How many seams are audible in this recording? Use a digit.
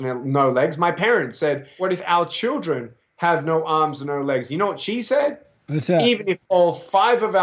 1